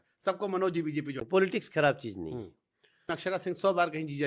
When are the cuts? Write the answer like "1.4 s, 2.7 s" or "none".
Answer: 1.1 s, 3.1 s